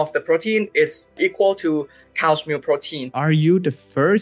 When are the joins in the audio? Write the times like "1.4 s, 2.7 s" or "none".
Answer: 1.2 s, 3.1 s